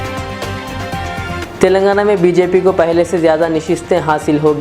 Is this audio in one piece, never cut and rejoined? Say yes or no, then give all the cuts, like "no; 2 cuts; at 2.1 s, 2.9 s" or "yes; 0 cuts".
no; 1 cut; at 1.4 s